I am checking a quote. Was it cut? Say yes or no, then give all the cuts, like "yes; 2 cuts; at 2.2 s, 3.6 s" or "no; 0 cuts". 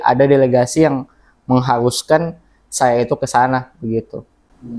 no; 0 cuts